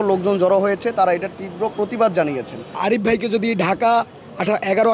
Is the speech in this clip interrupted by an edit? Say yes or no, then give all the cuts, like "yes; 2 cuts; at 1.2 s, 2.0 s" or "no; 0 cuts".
yes; 1 cut; at 2.8 s